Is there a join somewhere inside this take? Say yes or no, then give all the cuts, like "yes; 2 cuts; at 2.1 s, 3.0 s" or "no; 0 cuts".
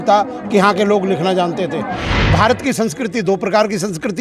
yes; 1 cut; at 2.1 s